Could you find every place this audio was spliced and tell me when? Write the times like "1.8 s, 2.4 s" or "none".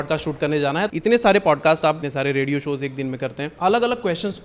0.9 s, 2.0 s, 3.5 s